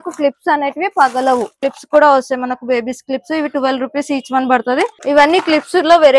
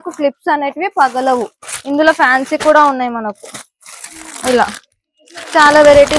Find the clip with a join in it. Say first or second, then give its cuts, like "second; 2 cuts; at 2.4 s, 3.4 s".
first; 2 cuts; at 1.7 s, 5.0 s